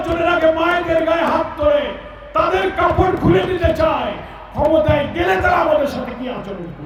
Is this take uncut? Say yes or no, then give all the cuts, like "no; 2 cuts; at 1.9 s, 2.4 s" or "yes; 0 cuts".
yes; 0 cuts